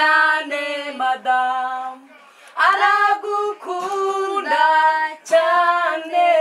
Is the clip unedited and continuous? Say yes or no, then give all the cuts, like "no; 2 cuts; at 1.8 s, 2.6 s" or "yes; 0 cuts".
yes; 0 cuts